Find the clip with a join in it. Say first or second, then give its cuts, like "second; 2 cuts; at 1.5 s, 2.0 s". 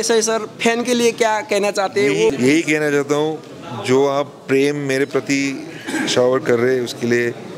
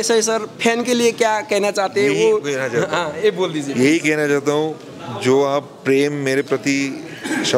first; 1 cut; at 2.3 s